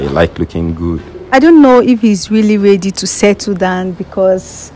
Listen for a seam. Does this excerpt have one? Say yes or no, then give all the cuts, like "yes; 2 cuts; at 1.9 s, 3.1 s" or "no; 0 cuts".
yes; 1 cut; at 1.3 s